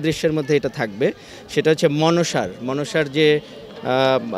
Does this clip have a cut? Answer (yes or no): no